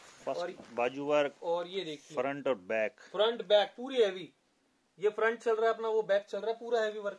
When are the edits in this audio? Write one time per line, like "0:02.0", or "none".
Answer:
none